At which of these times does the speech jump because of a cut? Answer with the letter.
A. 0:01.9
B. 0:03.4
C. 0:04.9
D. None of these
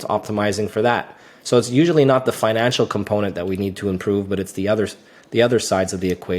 D